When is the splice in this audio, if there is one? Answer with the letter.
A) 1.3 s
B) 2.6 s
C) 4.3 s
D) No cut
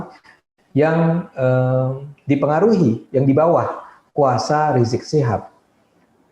D